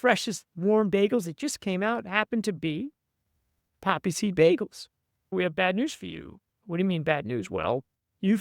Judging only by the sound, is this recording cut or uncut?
cut